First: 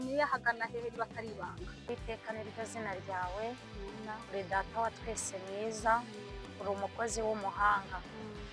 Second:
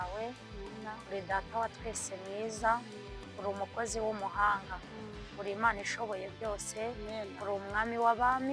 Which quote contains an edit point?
first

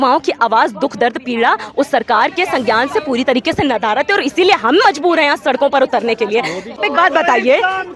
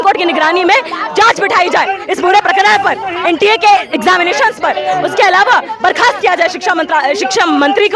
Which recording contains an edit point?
first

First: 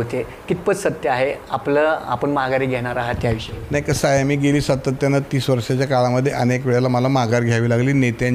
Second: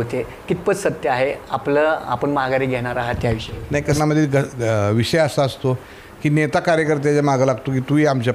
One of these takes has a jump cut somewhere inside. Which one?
second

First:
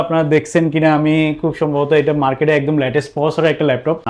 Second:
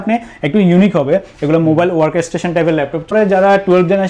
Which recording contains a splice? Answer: second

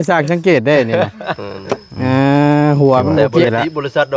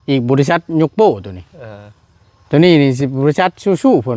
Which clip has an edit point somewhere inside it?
first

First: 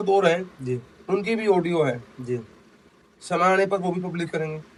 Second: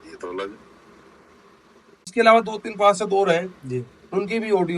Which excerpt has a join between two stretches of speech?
second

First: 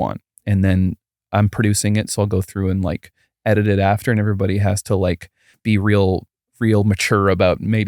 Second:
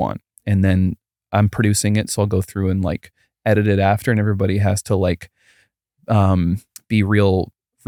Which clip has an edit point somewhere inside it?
first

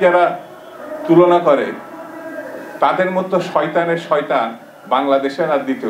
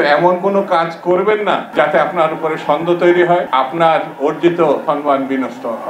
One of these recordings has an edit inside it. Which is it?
second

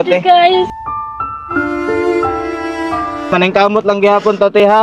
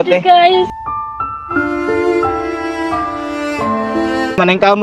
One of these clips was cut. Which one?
first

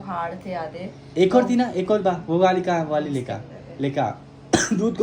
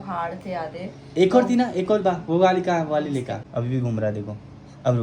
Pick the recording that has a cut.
second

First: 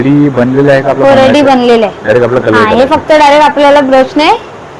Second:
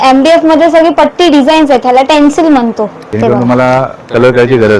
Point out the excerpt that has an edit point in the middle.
second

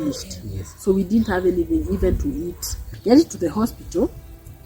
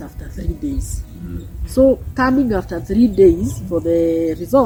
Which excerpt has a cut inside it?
first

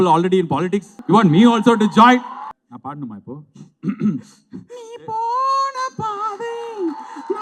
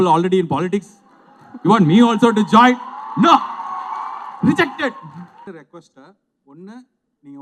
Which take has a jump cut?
first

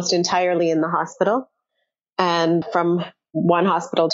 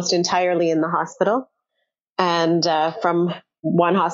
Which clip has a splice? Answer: first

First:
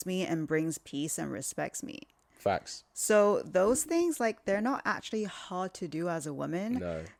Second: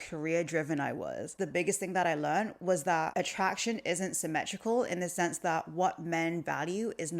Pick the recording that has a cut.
second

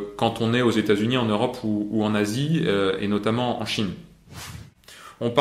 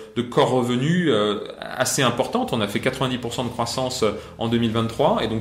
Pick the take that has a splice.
first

